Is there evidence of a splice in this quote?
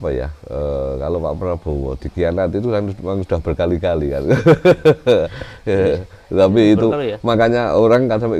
no; 0 cuts

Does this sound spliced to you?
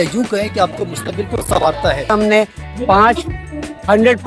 yes; 1 cut; at 2.1 s

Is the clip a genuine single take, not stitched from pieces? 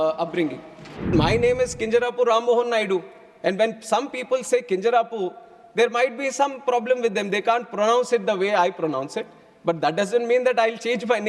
no; 1 cut; at 1.1 s

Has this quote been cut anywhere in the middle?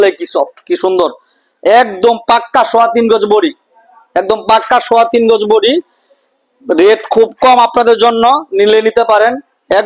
no; 0 cuts

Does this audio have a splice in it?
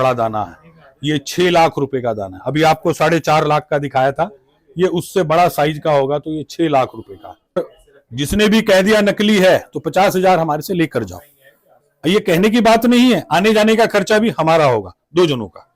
yes; 1 cut; at 7.6 s

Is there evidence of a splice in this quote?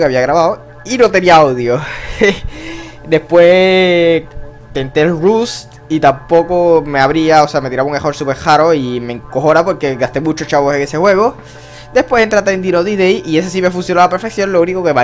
no; 0 cuts

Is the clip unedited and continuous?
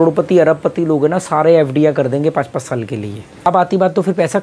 no; 1 cut; at 3.5 s

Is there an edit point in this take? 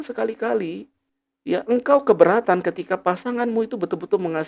no; 0 cuts

